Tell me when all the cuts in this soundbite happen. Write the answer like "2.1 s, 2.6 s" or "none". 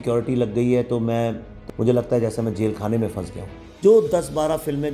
1.5 s, 3.6 s